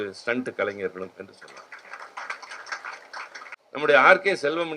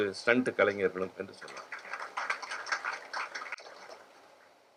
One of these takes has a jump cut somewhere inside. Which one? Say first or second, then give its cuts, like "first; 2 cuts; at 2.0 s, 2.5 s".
first; 1 cut; at 3.6 s